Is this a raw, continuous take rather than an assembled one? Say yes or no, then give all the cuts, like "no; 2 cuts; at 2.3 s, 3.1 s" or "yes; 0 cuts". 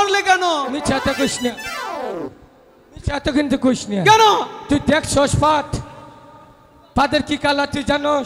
yes; 0 cuts